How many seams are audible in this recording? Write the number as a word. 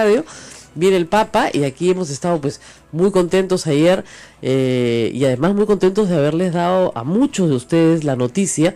zero